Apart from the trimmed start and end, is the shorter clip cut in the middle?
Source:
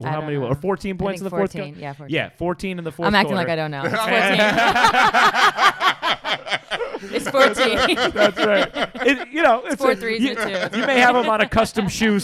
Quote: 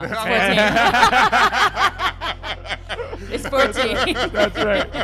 no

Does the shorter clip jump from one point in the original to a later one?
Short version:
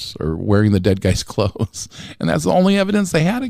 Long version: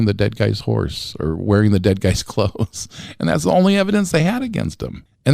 no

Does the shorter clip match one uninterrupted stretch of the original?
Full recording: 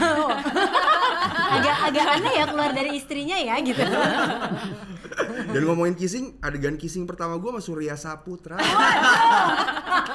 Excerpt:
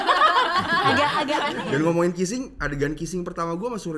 no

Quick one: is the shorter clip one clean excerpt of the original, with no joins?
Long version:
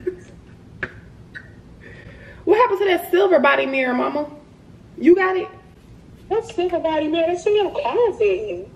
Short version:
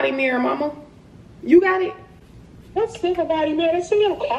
yes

